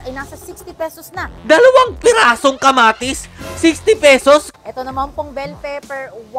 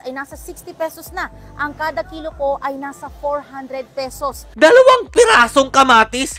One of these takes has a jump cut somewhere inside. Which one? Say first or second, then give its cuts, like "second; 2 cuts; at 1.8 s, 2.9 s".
first; 2 cuts; at 1.3 s, 4.5 s